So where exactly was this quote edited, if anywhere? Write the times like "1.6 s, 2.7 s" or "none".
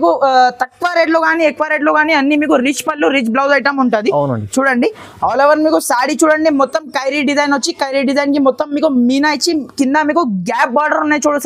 none